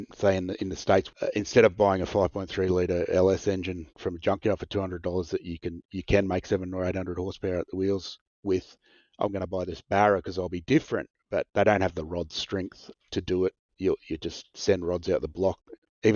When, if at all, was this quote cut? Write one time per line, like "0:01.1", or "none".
0:01.1